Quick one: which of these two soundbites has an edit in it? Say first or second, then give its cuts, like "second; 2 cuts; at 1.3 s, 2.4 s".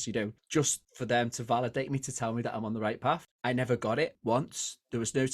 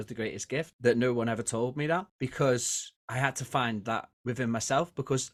first; 1 cut; at 3.3 s